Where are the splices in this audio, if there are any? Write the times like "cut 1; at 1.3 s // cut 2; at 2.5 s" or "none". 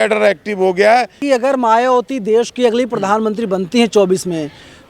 cut 1; at 1.2 s